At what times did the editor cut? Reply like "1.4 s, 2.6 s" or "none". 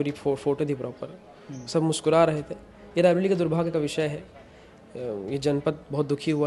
none